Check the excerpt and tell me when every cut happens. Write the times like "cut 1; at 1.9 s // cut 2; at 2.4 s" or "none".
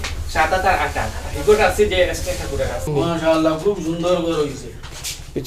cut 1; at 2.9 s